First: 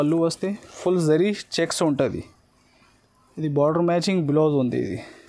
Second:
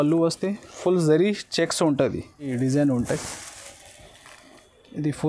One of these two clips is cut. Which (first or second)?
second